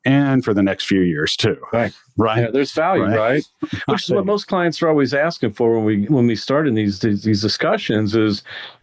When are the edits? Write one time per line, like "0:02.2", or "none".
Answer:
none